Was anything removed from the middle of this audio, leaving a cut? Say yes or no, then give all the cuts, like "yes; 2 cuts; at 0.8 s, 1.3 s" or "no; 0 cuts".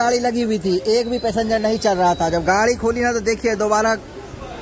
no; 0 cuts